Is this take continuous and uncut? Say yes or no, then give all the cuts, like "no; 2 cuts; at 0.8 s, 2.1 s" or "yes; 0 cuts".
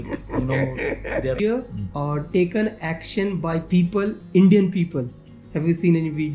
no; 1 cut; at 1.4 s